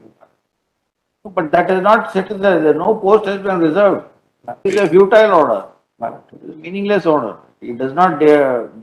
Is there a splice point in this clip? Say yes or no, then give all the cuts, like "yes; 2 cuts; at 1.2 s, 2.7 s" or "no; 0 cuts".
yes; 1 cut; at 4.6 s